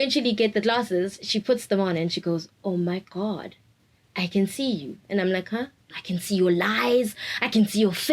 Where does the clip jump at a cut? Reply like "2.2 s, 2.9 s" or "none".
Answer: 6.0 s